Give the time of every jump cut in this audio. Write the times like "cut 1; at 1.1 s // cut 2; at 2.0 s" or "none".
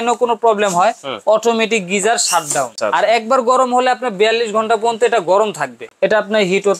cut 1; at 2.8 s // cut 2; at 5.8 s